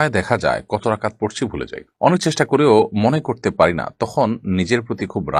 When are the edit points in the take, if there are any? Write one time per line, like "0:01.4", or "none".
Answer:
none